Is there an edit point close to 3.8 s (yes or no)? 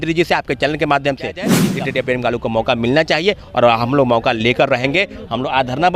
no